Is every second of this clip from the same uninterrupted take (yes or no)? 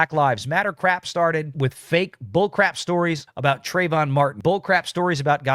no